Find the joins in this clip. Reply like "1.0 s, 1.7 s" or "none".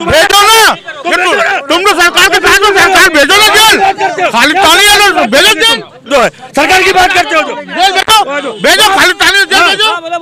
none